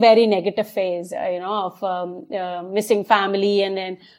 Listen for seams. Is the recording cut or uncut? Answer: uncut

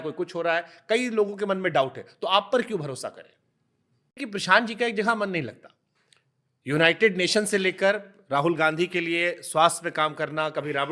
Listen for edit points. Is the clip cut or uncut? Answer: cut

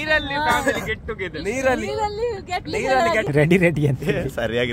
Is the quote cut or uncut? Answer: cut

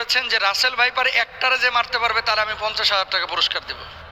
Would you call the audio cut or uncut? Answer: uncut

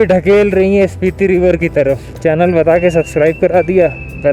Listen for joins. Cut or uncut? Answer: cut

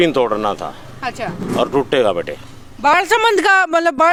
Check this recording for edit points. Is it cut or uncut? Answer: uncut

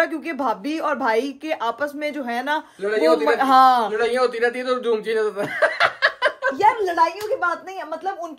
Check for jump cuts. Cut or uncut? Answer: uncut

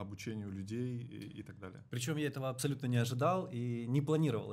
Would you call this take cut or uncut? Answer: uncut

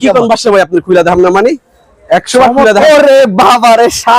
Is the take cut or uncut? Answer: cut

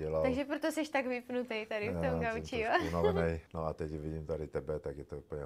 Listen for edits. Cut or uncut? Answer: cut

